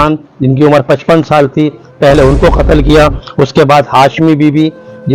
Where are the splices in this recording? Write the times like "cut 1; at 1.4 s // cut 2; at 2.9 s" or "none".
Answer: none